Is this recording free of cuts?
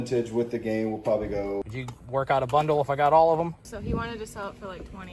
no; 2 cuts; at 1.7 s, 3.6 s

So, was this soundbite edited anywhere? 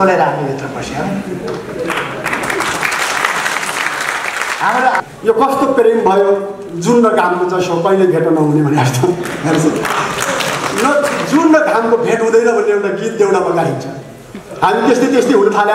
yes; 1 cut; at 5.0 s

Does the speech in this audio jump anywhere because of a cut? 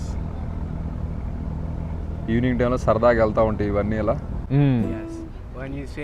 yes; 1 cut; at 4.3 s

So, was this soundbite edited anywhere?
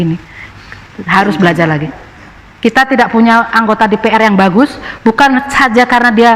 yes; 1 cut; at 1.9 s

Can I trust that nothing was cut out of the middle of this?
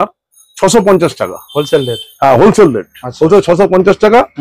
yes; 0 cuts

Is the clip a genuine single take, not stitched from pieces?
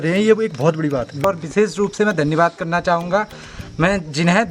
no; 1 cut; at 1.2 s

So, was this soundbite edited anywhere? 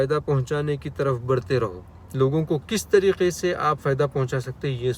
no; 0 cuts

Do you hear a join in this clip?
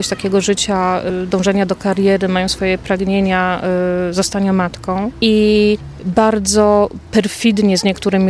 yes; 4 cuts; at 1.1 s, 5.1 s, 5.9 s, 7.0 s

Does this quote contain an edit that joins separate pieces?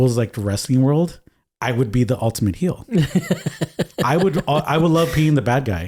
no; 0 cuts

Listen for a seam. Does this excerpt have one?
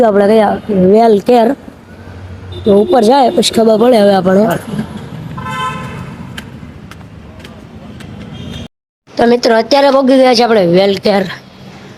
no; 0 cuts

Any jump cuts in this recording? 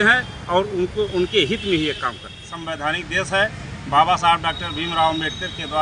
yes; 1 cut; at 2.1 s

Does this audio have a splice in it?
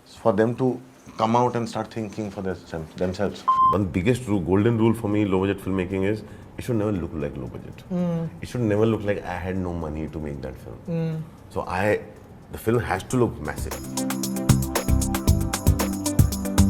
yes; 2 cuts; at 3.5 s, 13.7 s

